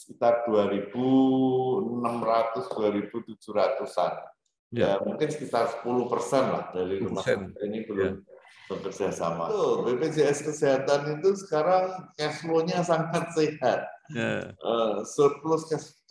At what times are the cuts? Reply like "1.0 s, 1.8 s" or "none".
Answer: 9.5 s